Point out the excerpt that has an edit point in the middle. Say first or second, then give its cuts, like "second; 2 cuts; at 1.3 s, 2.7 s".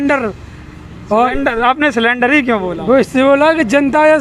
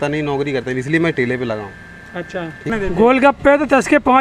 second; 1 cut; at 2.7 s